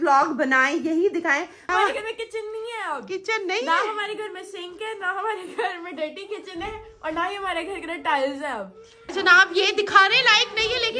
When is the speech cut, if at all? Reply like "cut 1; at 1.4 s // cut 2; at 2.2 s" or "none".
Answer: cut 1; at 1.6 s // cut 2; at 9.1 s